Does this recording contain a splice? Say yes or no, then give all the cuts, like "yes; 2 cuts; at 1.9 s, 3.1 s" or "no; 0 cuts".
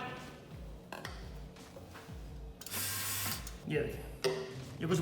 yes; 1 cut; at 3.6 s